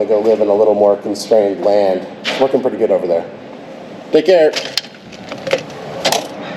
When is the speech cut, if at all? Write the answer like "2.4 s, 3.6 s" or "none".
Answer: none